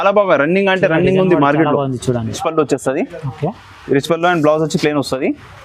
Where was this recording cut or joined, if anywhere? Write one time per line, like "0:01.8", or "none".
0:02.4